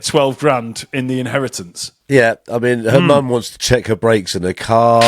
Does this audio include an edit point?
yes; 1 cut; at 1.8 s

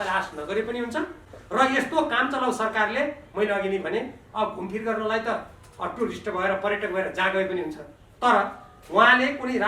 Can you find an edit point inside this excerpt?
no; 0 cuts

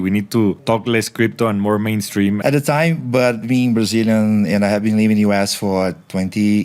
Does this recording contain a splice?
yes; 1 cut; at 2.4 s

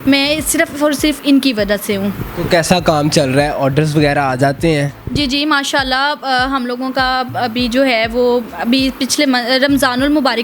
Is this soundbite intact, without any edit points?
yes; 0 cuts

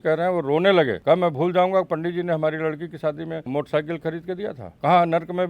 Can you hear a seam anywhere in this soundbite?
yes; 3 cuts; at 1.0 s, 3.5 s, 4.7 s

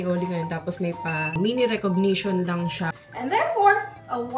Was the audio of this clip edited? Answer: yes; 1 cut; at 2.9 s

